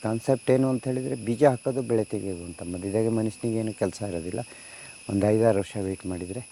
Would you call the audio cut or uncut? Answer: uncut